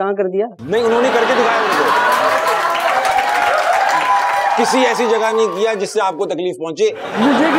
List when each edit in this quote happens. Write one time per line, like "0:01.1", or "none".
none